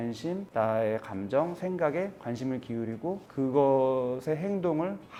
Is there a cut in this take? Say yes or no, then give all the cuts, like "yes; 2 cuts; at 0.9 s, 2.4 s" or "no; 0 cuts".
no; 0 cuts